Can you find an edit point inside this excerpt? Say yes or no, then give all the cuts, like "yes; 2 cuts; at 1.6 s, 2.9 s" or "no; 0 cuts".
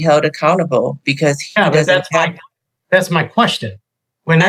no; 0 cuts